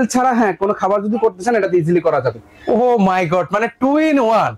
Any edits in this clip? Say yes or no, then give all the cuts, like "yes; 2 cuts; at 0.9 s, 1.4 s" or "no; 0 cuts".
no; 0 cuts